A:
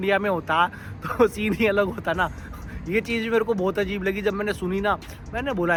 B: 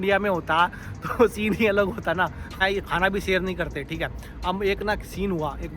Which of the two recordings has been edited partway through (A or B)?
B